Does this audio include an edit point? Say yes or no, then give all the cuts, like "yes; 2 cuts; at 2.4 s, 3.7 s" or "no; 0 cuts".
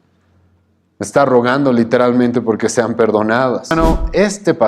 yes; 1 cut; at 3.7 s